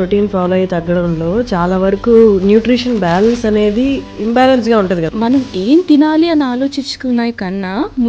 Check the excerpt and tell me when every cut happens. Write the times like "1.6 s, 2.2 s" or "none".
4.1 s, 5.1 s